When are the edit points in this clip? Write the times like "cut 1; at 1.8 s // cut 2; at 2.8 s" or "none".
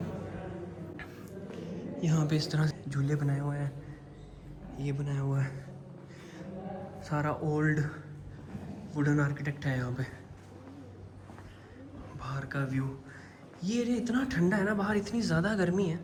none